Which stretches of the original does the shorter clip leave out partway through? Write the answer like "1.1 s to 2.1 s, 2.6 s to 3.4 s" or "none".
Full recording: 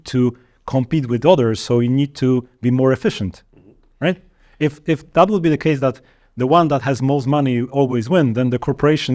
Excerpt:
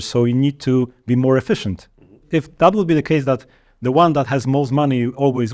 3.8 s to 4.8 s